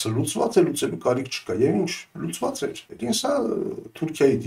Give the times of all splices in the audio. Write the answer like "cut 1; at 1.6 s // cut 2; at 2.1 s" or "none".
cut 1; at 2.9 s

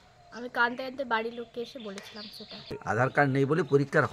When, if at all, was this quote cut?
cut 1; at 2.8 s

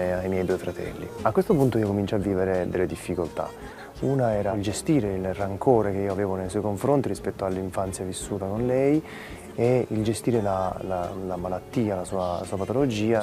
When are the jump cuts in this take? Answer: cut 1; at 1.1 s // cut 2; at 4.6 s

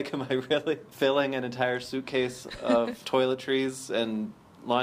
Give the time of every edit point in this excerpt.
cut 1; at 0.9 s // cut 2; at 3.0 s

